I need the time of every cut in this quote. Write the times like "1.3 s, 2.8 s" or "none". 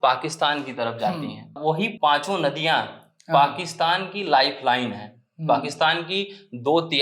1.8 s